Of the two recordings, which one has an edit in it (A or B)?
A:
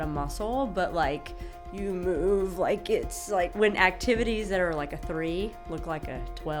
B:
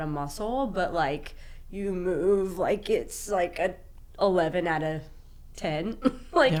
A